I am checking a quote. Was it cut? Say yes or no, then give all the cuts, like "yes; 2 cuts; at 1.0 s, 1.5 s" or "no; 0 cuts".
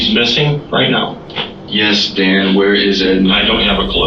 no; 0 cuts